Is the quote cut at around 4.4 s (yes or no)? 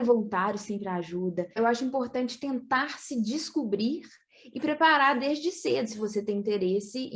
no